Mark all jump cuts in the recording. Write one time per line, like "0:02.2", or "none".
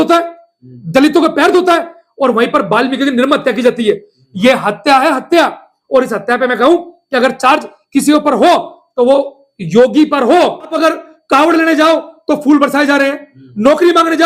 0:10.7

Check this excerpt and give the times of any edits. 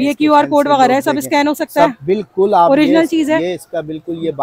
none

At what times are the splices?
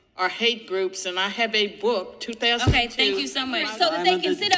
0:03.6

